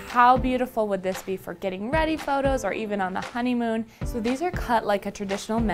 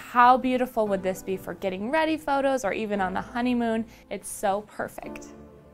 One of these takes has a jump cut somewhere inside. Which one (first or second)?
first